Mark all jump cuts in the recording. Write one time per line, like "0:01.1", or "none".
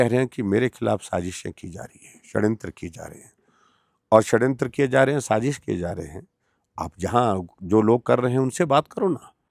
none